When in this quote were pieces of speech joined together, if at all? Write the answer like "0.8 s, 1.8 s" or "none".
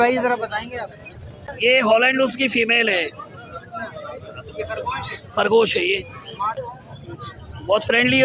1.5 s, 6.6 s